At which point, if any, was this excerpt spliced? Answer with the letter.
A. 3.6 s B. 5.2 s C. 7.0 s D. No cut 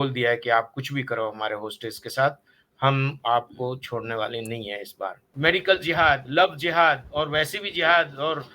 B